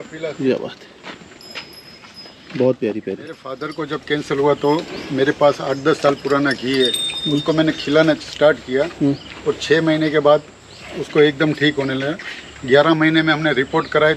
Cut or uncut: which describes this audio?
cut